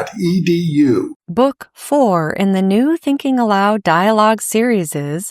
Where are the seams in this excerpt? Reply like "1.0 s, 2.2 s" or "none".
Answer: 1.2 s